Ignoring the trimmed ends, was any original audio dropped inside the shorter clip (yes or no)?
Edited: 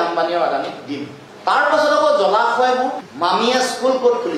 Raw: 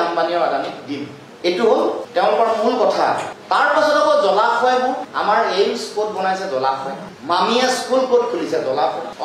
yes